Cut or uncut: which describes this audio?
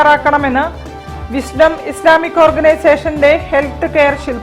uncut